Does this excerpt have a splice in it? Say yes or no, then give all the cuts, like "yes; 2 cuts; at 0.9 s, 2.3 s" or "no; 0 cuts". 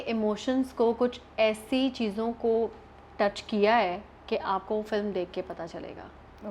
no; 0 cuts